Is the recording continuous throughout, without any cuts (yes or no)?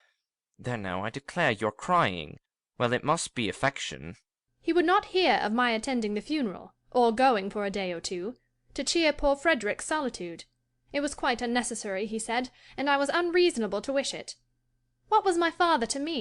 no